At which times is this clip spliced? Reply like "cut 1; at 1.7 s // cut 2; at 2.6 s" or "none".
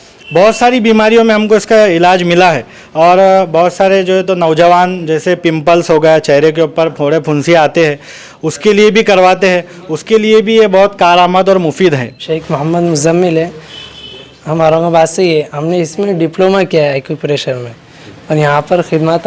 cut 1; at 12.2 s